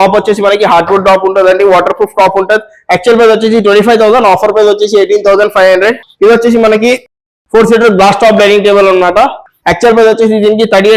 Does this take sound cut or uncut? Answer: uncut